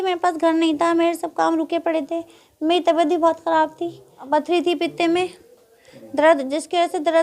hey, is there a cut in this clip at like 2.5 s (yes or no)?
no